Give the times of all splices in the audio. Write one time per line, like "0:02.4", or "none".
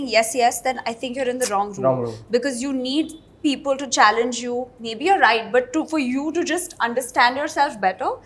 none